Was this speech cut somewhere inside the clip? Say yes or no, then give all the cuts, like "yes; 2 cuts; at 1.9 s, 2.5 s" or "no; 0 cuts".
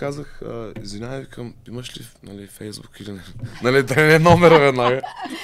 no; 0 cuts